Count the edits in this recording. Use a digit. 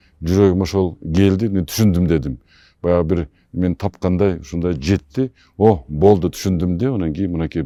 0